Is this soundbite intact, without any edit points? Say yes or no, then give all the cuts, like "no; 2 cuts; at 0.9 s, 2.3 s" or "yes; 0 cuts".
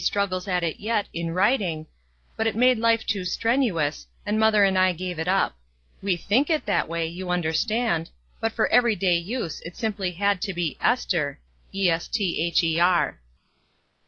yes; 0 cuts